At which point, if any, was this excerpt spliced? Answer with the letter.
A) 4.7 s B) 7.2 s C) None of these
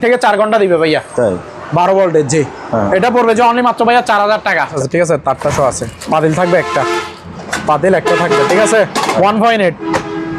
A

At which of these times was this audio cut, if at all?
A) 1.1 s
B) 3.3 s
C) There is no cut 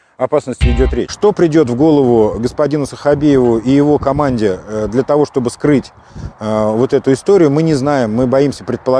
A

